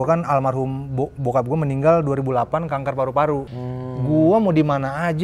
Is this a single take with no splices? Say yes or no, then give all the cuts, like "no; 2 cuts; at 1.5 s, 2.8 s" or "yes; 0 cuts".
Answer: no; 1 cut; at 3.5 s